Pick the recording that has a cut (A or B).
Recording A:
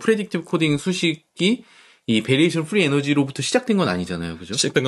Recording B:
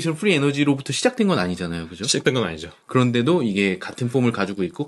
A